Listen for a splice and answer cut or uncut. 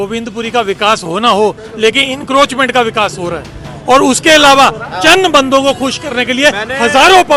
uncut